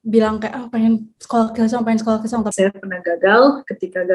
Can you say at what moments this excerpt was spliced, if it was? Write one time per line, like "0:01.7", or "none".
0:02.5